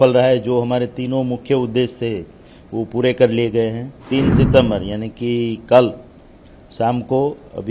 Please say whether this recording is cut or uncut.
cut